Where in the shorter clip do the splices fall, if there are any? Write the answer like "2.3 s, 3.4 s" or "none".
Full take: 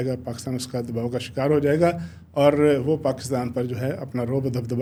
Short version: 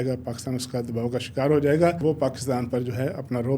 2.0 s